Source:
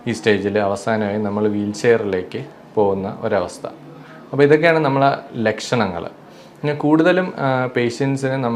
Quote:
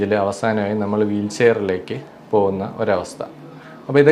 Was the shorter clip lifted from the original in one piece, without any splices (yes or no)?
yes